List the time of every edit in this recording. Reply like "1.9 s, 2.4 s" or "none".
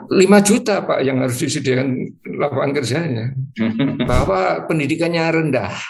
4.1 s